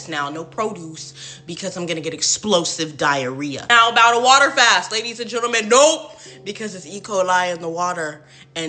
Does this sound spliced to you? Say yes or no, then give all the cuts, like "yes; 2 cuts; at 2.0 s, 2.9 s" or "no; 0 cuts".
yes; 1 cut; at 3.6 s